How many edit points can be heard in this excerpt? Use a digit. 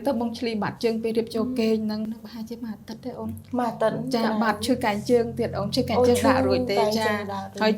1